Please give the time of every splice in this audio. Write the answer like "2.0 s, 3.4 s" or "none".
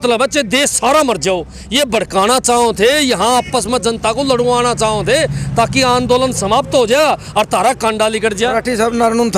none